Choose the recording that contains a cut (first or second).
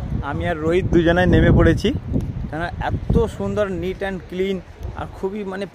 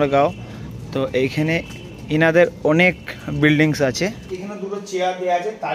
second